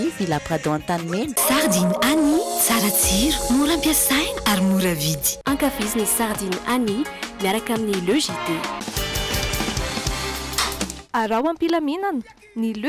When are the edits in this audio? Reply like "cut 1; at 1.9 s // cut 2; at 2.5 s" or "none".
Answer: cut 1; at 1.4 s